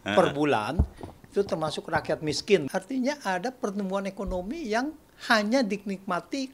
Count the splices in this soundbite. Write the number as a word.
one